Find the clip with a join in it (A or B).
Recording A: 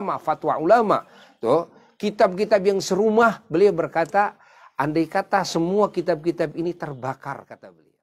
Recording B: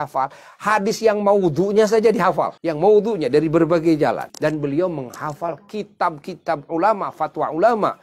B